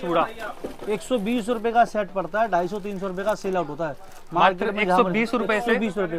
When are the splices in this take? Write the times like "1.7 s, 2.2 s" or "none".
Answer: none